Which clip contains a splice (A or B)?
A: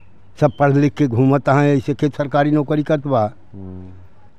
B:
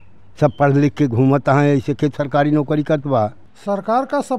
B